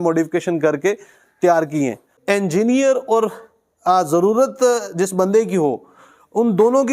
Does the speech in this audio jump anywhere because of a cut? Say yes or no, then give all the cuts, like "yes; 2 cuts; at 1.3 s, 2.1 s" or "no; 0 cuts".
yes; 1 cut; at 2.1 s